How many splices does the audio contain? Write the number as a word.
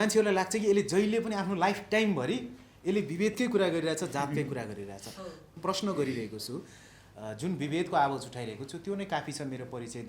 one